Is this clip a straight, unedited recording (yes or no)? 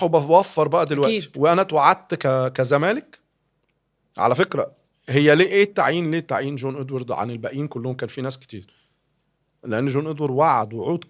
yes